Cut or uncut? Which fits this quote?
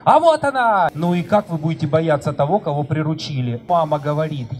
cut